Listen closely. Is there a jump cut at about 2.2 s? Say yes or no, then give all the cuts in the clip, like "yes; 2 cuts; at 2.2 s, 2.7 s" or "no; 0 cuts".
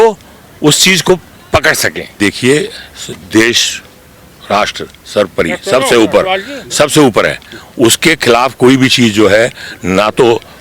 yes; 1 cut; at 2.2 s